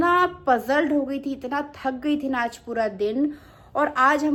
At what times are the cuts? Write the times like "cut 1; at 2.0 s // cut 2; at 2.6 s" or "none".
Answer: none